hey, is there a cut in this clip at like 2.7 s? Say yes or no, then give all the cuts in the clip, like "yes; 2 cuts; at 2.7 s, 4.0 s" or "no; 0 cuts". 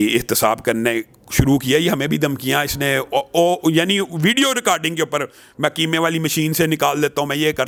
no; 0 cuts